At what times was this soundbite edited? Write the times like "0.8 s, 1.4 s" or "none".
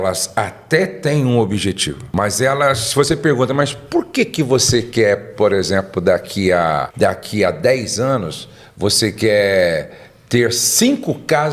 1.9 s, 6.9 s